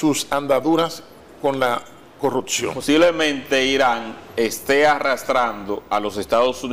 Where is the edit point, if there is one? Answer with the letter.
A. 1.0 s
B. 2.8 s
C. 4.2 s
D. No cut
B